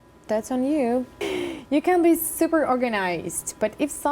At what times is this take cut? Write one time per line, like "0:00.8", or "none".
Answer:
0:01.2